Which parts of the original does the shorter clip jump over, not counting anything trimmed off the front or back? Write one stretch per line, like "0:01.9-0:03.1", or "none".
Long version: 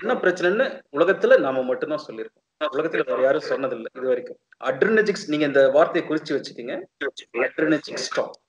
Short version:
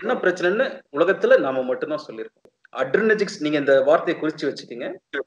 0:02.5-0:04.3